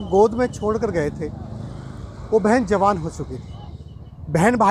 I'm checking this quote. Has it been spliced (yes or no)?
no